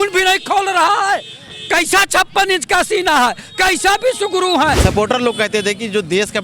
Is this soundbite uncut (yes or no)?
no